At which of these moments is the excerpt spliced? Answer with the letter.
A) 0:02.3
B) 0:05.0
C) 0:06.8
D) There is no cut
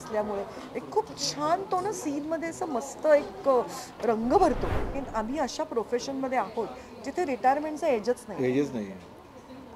B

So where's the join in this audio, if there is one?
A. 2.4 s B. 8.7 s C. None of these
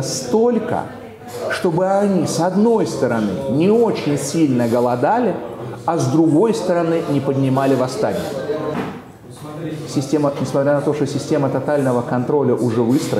B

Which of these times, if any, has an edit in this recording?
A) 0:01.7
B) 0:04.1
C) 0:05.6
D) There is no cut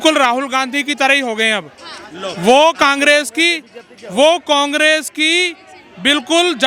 D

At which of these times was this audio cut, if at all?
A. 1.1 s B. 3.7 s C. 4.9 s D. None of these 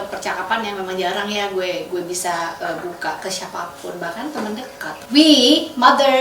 C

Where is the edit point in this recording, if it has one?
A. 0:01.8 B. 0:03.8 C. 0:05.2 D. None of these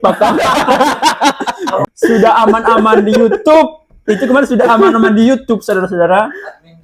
A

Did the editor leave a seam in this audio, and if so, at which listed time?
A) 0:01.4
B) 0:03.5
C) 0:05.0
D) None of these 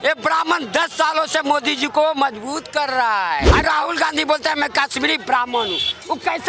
B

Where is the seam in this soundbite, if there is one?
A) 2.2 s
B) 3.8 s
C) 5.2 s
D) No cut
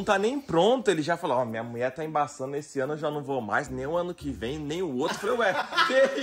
D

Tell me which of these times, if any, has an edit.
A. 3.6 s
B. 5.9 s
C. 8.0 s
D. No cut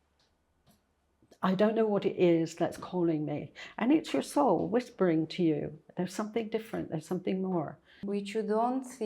C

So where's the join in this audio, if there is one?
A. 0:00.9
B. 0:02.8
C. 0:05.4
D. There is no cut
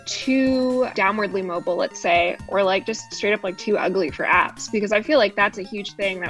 A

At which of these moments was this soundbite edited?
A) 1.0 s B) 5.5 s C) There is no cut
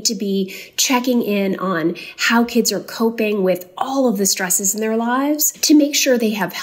B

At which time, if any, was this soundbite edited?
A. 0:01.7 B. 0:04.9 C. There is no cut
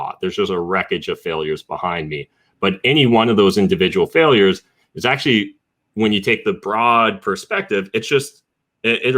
C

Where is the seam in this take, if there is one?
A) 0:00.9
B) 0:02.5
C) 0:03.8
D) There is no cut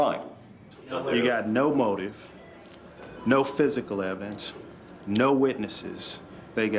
A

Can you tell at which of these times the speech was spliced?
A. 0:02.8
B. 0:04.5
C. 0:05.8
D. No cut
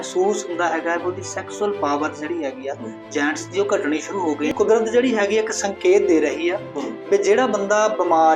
B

